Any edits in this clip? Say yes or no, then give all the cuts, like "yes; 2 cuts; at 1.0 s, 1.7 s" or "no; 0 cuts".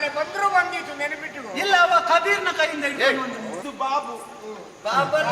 yes; 1 cut; at 3.5 s